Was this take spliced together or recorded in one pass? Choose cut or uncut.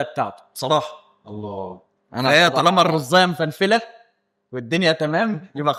uncut